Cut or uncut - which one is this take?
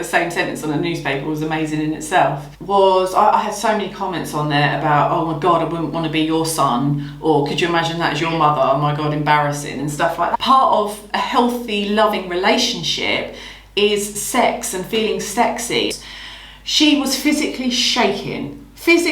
cut